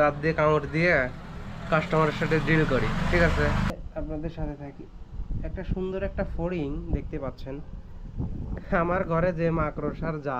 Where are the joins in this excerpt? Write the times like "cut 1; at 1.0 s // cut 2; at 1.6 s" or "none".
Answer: cut 1; at 3.7 s